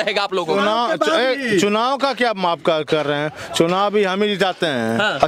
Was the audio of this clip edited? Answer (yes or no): no